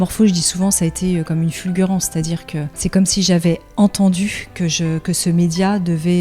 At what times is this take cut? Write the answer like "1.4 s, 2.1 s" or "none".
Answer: 2.7 s